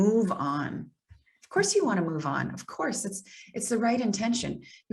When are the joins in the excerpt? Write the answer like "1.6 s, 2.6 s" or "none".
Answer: none